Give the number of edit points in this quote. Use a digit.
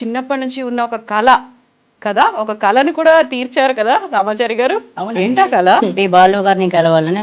1